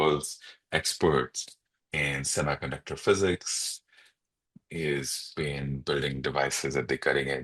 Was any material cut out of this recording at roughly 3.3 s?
no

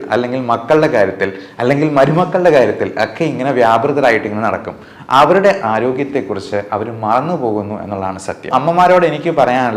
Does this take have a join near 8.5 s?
yes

